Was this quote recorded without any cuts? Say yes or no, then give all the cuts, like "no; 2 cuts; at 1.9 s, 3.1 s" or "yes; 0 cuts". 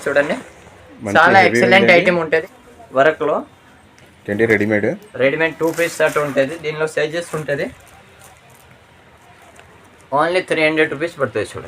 no; 1 cut; at 2.6 s